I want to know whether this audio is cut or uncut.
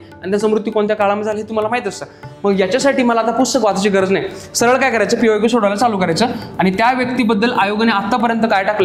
uncut